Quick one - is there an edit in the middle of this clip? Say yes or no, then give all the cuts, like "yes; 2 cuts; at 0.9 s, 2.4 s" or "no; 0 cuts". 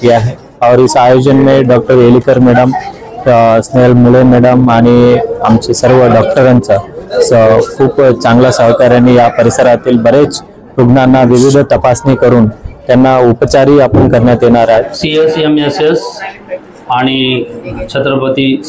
yes; 1 cut; at 15.0 s